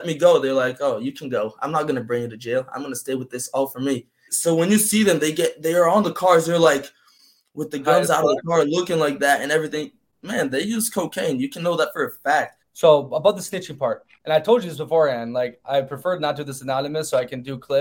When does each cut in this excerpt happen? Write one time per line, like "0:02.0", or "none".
0:04.3
0:12.6

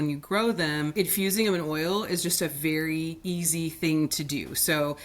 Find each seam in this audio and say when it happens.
0:00.9

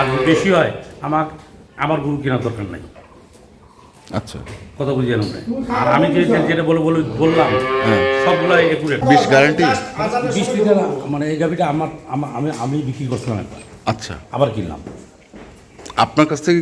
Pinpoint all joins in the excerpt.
0:09.0

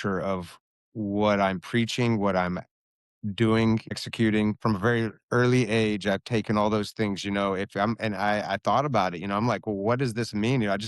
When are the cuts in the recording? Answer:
0:04.6

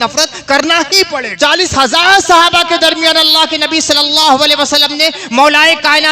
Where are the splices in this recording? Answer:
0:01.3

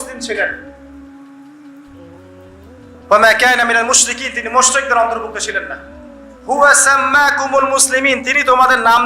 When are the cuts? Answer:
0:01.2
0:03.1

